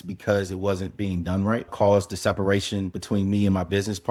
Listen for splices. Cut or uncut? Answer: uncut